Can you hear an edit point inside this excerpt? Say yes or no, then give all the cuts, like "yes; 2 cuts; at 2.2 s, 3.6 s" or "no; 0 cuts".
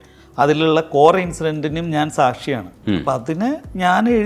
no; 0 cuts